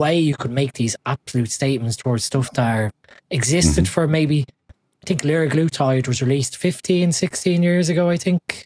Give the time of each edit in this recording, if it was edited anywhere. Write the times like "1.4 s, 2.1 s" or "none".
none